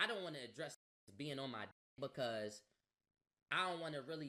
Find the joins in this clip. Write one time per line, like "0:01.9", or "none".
none